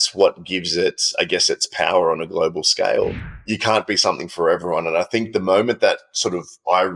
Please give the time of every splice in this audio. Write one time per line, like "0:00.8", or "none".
0:03.3